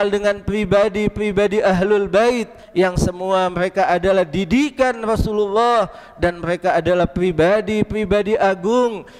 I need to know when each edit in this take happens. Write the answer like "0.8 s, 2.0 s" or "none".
2.6 s